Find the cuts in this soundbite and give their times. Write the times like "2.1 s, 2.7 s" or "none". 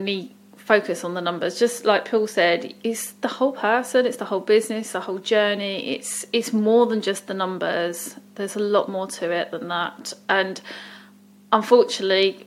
2.7 s